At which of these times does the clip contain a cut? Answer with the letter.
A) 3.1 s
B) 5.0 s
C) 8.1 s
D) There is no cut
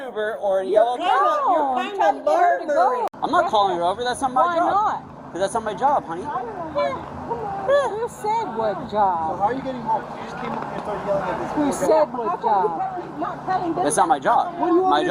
A